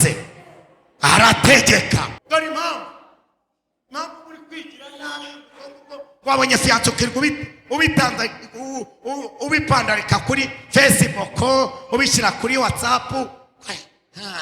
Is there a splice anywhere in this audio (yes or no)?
yes